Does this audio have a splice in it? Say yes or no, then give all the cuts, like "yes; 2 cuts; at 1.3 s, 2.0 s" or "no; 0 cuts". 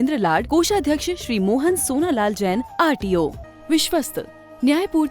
yes; 1 cut; at 3.4 s